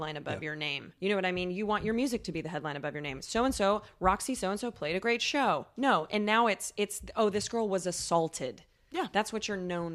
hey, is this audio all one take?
no; 1 cut; at 0.9 s

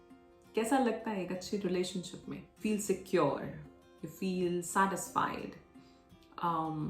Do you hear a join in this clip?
yes; 1 cut; at 2.5 s

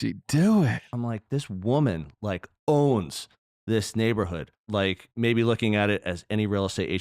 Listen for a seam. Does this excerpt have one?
yes; 2 cuts; at 0.8 s, 4.7 s

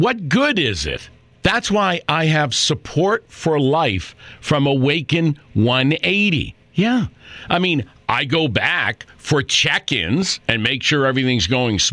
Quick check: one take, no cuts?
yes; 0 cuts

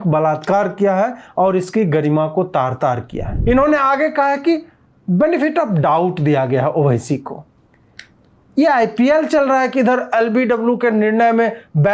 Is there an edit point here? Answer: yes; 1 cut; at 3.3 s

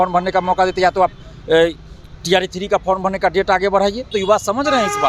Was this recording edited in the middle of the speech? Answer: yes; 1 cut; at 4.1 s

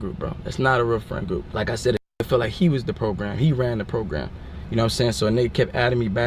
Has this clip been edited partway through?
yes; 1 cut; at 1.5 s

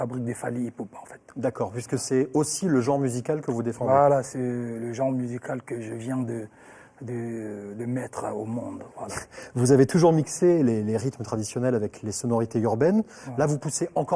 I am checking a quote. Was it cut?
no; 0 cuts

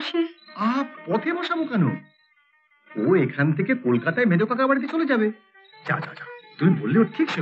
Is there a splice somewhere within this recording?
no; 0 cuts

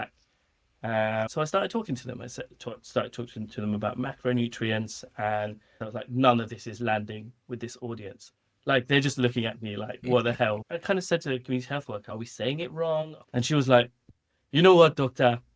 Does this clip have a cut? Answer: yes; 5 cuts; at 1.3 s, 5.8 s, 10.6 s, 12.1 s, 13.2 s

